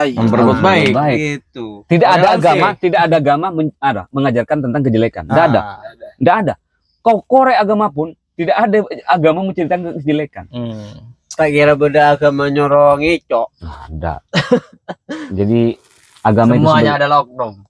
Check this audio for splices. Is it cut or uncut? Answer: uncut